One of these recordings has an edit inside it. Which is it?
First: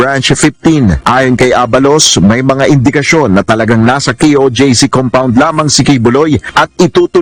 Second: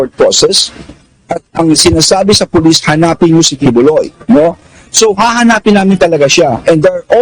second; 1 cut; at 1.5 s

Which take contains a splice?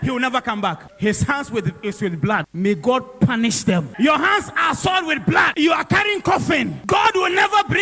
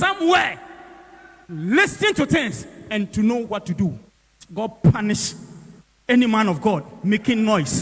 first; 5 cuts; at 0.9 s, 2.5 s, 3.9 s, 5.5 s, 6.8 s

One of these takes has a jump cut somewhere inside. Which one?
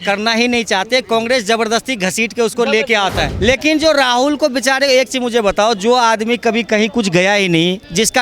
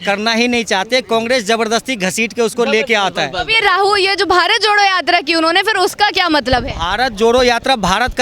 first; 1 cut; at 3.3 s

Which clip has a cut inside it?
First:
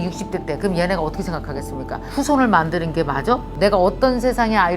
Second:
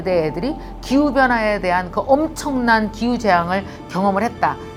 first; 2 cuts; at 2.0 s, 3.5 s

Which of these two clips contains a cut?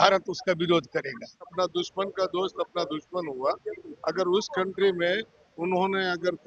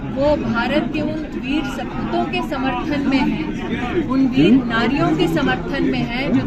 first; 1 cut; at 1.5 s

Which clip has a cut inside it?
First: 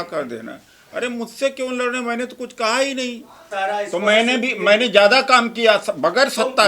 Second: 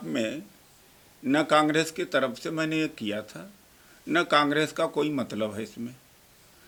first; 1 cut; at 3.5 s

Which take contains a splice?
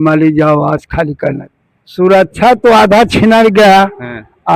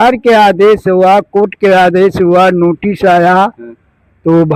first; 1 cut; at 1.4 s

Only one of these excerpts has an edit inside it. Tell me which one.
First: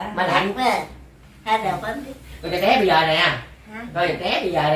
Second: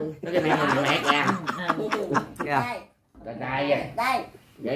second; 1 cut; at 2.5 s

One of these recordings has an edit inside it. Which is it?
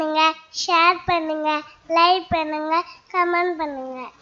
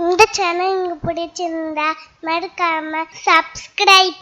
second; 1 cut; at 3.1 s

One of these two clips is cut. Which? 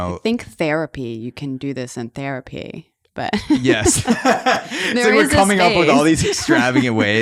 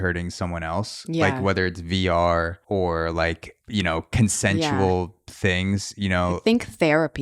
second; 3 cuts; at 2.6 s, 3.5 s, 5.2 s

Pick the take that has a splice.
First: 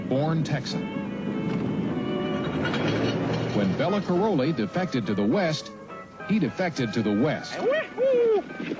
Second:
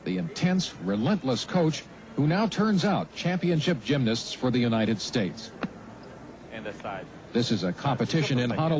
second; 1 cut; at 2.7 s

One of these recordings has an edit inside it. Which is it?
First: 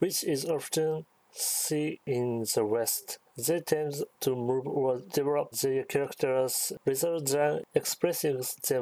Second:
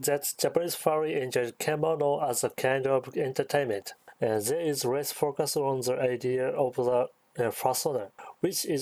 first; 4 cuts; at 2.0 s, 3.0 s, 4.1 s, 5.2 s

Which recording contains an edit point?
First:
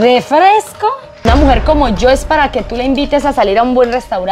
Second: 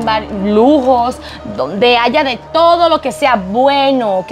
first; 1 cut; at 1.1 s

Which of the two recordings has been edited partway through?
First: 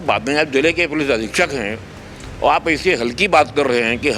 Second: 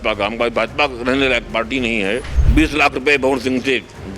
second; 1 cut; at 2.4 s

